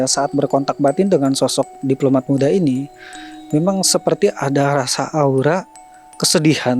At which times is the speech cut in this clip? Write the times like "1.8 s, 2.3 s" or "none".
none